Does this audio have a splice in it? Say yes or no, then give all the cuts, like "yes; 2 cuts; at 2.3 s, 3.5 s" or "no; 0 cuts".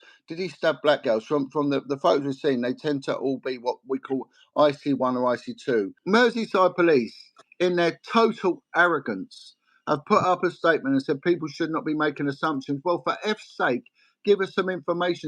yes; 1 cut; at 6.0 s